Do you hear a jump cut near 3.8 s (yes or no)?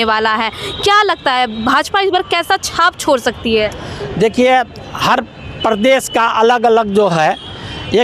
no